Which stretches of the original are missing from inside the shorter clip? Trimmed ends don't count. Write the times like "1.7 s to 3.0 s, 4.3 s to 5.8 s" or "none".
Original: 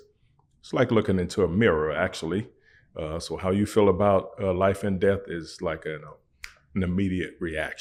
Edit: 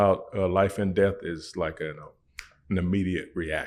none